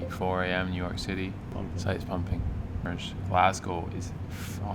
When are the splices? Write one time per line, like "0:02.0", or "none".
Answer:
0:01.5
0:02.8